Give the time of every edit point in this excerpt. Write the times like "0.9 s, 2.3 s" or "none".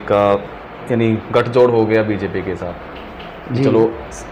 none